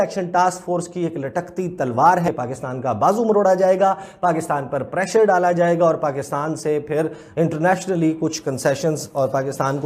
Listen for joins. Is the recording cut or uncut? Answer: uncut